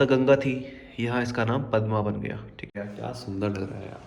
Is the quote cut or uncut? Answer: cut